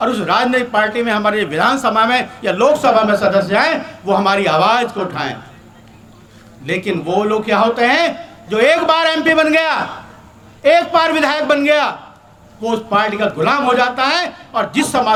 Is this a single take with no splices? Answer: yes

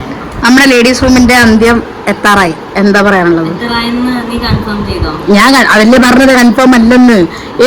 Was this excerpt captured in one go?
yes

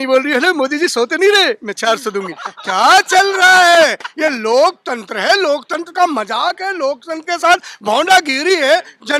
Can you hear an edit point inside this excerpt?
no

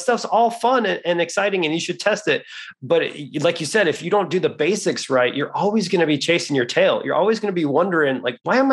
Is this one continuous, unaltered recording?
yes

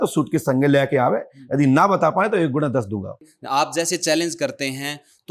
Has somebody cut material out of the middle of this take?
yes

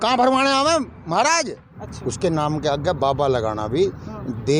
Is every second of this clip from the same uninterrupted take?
no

